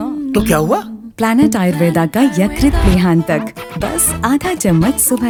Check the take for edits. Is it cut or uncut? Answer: uncut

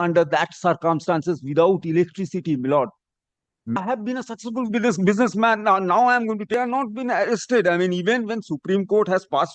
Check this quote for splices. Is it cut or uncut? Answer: cut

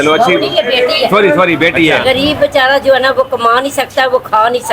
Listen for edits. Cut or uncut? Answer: cut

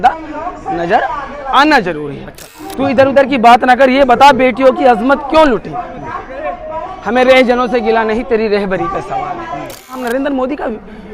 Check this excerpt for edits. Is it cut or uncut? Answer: cut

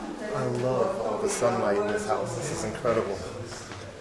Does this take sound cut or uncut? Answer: uncut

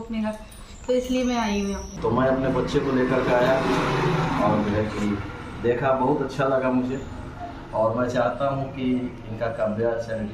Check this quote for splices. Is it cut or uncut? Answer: cut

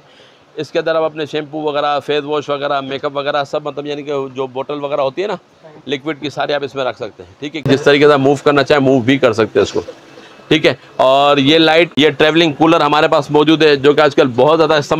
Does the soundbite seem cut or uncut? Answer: cut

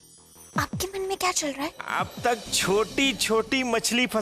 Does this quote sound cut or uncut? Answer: cut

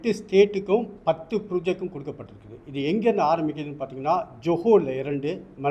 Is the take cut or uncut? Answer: uncut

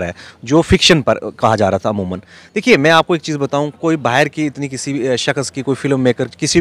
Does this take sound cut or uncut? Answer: uncut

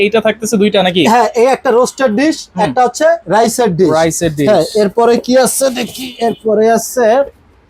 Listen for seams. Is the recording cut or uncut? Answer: uncut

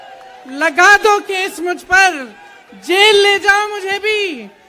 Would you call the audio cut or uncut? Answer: uncut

